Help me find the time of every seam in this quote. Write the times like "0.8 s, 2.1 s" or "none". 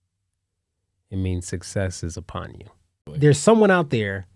3.1 s